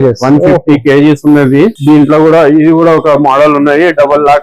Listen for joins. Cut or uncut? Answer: cut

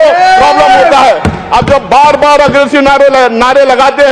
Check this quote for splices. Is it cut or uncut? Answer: uncut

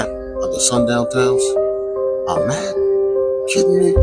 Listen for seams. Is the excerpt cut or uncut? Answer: uncut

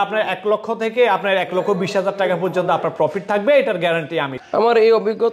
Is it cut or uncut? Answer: cut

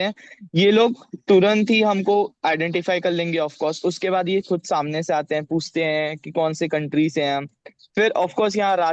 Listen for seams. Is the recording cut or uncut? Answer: uncut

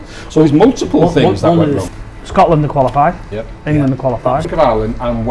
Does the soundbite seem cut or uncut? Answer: cut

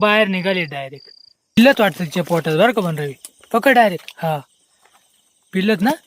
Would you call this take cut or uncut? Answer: cut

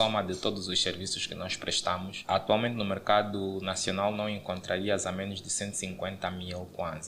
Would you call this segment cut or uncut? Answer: uncut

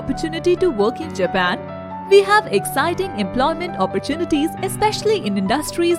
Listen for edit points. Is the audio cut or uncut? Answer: uncut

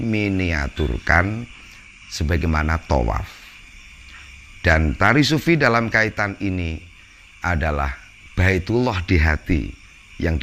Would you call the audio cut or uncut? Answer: uncut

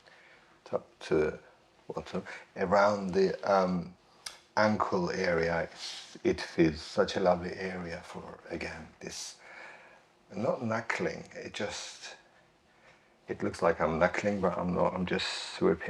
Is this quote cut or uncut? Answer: uncut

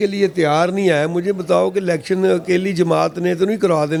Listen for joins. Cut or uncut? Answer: uncut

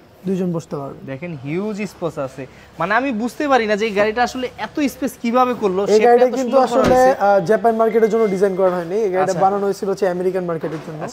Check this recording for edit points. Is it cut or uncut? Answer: uncut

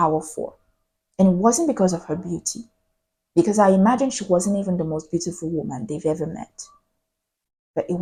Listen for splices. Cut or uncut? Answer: uncut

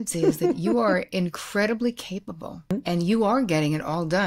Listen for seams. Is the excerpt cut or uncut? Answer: cut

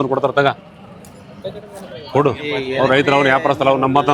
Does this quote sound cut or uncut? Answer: uncut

